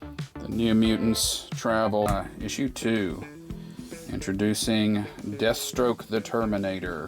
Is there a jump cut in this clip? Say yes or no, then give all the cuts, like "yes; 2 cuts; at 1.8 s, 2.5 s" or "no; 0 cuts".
yes; 1 cut; at 2.1 s